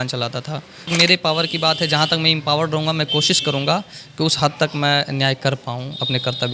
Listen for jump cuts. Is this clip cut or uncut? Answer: cut